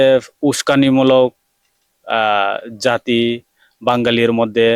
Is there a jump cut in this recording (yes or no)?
no